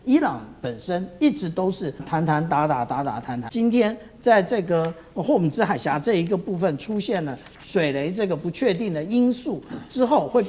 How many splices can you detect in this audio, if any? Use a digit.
2